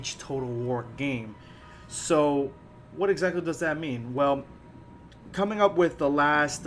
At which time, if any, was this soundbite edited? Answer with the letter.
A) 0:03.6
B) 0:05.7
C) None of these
A